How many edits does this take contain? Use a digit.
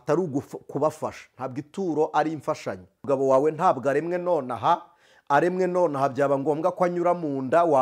1